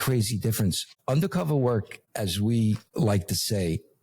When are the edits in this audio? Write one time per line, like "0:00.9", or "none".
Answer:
0:00.9
0:02.0
0:02.9